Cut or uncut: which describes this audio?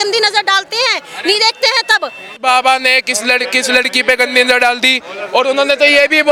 uncut